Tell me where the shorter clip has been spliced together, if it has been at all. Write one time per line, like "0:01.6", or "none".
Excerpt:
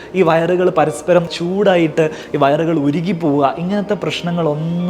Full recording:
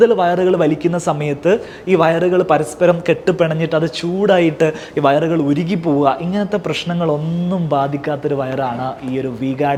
0:01.3